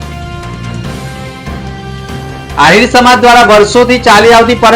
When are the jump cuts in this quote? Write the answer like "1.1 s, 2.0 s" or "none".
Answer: 1.0 s